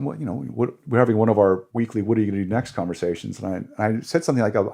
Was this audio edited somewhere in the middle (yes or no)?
yes